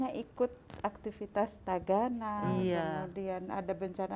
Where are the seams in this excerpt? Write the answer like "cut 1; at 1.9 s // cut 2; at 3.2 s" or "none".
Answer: none